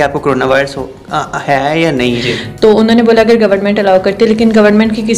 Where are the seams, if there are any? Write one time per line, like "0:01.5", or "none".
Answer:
0:02.2